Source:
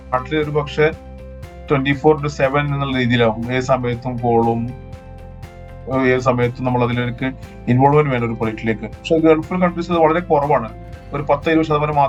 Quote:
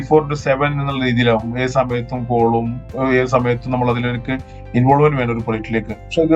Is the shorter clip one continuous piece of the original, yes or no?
no